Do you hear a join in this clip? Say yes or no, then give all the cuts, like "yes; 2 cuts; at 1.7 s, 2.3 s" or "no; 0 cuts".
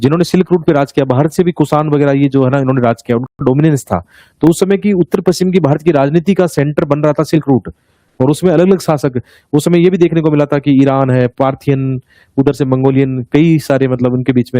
no; 0 cuts